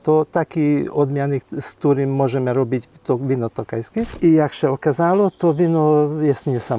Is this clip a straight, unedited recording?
no; 1 cut; at 4.1 s

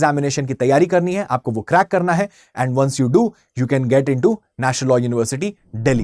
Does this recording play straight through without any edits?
yes; 0 cuts

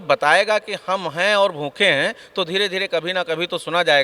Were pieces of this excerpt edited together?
no; 0 cuts

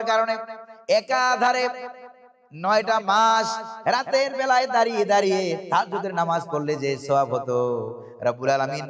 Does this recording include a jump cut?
no; 0 cuts

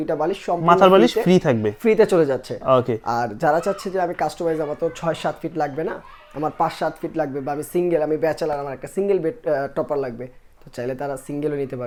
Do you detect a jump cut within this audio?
no; 0 cuts

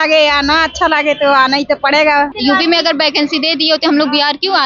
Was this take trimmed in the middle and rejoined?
yes; 1 cut; at 2.3 s

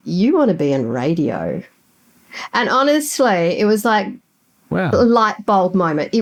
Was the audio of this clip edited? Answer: no; 0 cuts

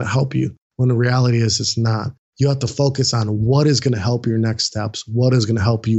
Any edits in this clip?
no; 0 cuts

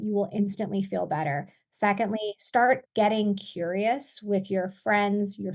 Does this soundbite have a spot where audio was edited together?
yes; 1 cut; at 2.9 s

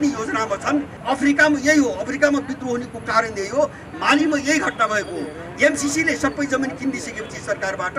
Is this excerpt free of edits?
no; 1 cut; at 0.9 s

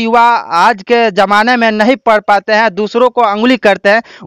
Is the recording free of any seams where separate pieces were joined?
yes; 0 cuts

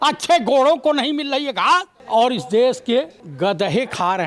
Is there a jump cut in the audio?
yes; 2 cuts; at 2.0 s, 3.2 s

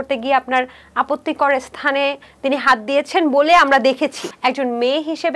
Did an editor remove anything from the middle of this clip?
yes; 1 cut; at 4.2 s

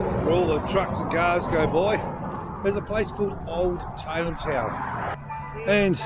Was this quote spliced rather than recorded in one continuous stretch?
yes; 1 cut; at 5.0 s

